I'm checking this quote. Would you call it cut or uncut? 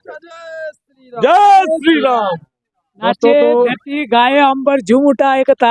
uncut